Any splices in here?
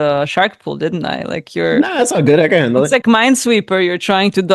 no; 0 cuts

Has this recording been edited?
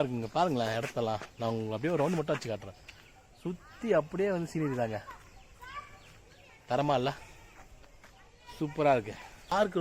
no; 0 cuts

